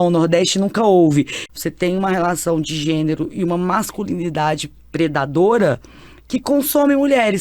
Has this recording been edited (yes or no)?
yes